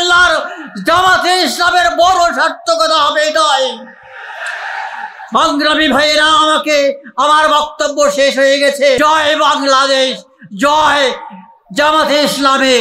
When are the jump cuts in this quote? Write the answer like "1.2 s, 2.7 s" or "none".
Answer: 9.0 s